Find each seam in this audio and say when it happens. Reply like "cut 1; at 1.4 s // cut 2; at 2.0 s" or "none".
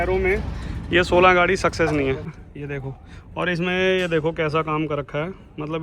cut 1; at 2.3 s